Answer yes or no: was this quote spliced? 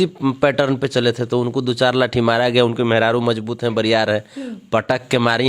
no